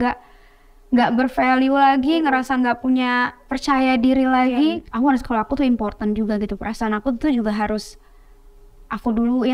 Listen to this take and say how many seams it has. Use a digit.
1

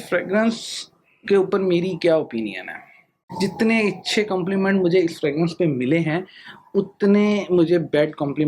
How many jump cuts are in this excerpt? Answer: 1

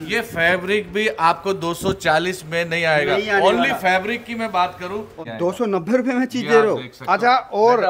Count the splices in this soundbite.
1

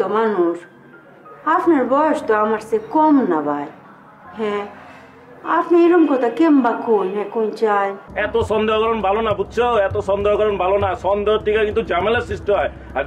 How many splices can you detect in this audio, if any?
1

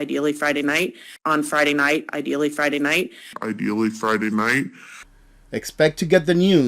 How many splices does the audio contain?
2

